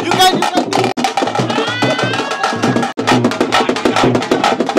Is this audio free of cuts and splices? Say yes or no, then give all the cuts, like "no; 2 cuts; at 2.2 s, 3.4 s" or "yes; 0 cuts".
no; 2 cuts; at 1.0 s, 3.0 s